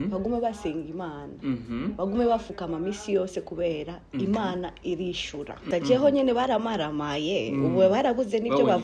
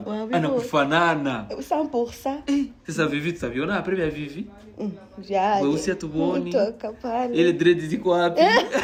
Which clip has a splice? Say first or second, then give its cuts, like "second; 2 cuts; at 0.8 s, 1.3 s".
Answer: first; 1 cut; at 5.6 s